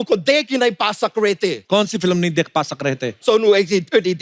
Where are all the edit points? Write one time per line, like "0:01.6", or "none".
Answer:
0:01.6
0:03.2